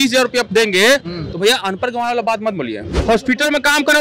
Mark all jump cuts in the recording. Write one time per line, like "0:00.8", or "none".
0:02.9